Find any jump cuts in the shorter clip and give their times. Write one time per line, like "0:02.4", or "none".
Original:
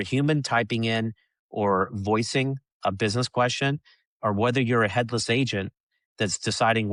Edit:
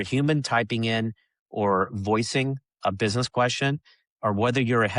none